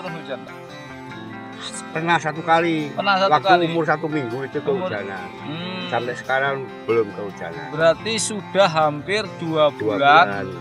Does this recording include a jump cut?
no; 0 cuts

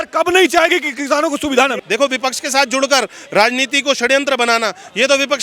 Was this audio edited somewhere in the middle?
yes; 1 cut; at 1.8 s

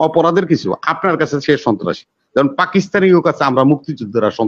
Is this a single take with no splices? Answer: yes; 0 cuts

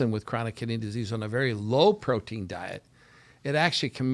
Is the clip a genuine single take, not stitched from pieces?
yes; 0 cuts

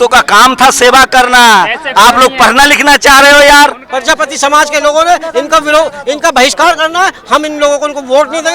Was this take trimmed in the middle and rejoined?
yes; 1 cut; at 3.9 s

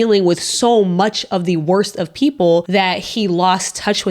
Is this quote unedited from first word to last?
no; 1 cut; at 2.7 s

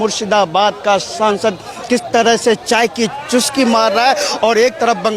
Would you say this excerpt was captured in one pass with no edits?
yes; 0 cuts

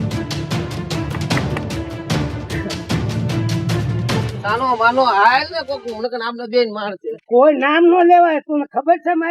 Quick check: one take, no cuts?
yes; 0 cuts

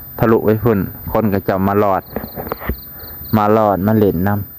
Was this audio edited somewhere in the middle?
no; 0 cuts

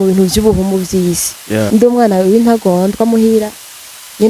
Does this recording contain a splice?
yes; 1 cut; at 1.7 s

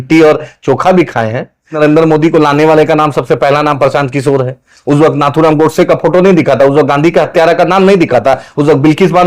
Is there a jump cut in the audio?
yes; 1 cut; at 1.8 s

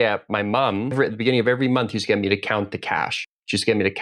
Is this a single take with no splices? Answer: no; 1 cut; at 0.9 s

